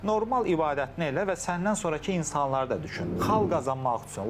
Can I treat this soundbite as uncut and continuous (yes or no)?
no